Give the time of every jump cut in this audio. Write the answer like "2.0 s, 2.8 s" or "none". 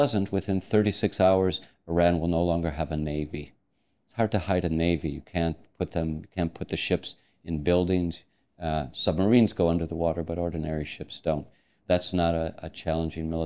11.8 s